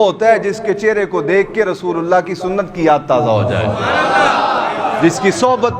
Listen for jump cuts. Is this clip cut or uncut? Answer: uncut